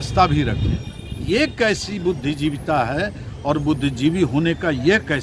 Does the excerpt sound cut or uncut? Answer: uncut